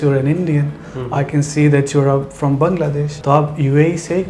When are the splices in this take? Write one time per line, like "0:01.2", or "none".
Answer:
0:03.1